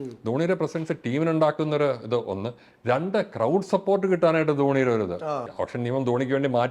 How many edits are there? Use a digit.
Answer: 1